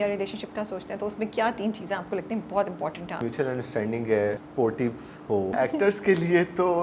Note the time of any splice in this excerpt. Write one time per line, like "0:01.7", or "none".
0:03.2
0:04.4
0:05.5